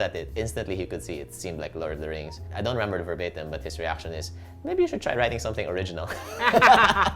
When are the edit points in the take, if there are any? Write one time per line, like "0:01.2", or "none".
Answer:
0:02.5

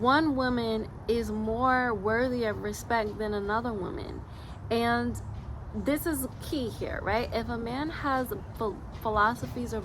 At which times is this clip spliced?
none

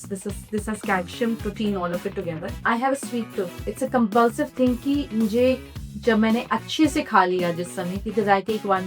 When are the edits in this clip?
0:02.5
0:03.6

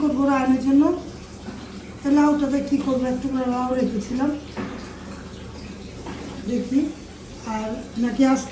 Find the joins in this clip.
none

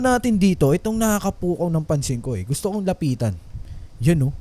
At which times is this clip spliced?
none

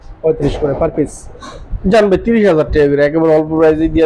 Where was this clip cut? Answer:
none

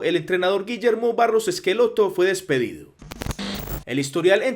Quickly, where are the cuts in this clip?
0:03.4

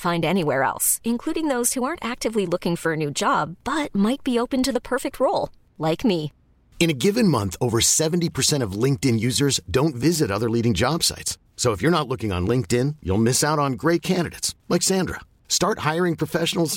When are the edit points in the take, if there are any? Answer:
none

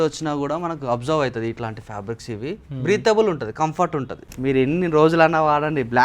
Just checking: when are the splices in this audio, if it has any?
0:04.2

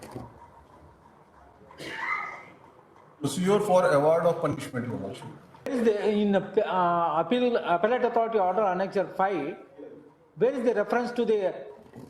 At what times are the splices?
0:05.7

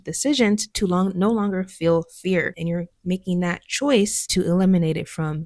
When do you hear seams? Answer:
0:02.6
0:04.2

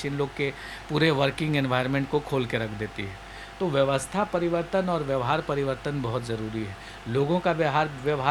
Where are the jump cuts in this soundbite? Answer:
none

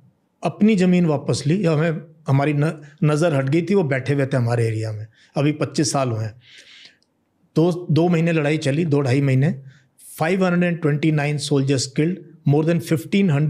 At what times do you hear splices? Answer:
none

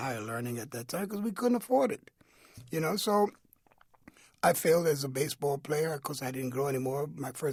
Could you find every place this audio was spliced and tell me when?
none

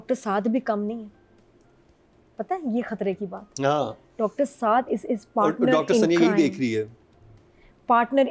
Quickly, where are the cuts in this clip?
none

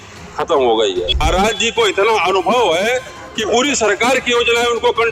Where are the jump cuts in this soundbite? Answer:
0:01.1

